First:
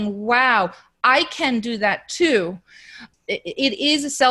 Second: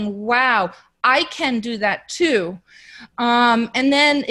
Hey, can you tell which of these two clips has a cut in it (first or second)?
first